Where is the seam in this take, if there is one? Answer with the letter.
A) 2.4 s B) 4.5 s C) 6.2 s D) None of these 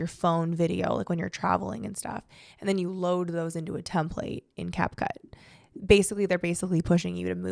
D